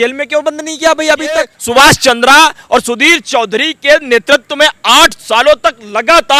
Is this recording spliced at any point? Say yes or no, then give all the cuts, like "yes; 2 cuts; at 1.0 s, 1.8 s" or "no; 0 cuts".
yes; 1 cut; at 1.6 s